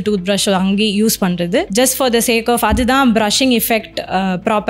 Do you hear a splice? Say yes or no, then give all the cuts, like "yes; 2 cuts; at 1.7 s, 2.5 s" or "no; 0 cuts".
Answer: yes; 1 cut; at 1.7 s